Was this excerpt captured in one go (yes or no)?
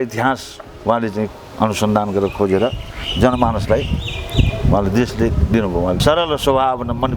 no